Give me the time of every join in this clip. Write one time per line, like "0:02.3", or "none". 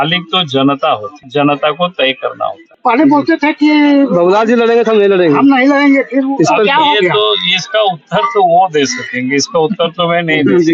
0:01.2
0:02.6